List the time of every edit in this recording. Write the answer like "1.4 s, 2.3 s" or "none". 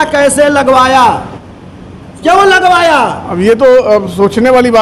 none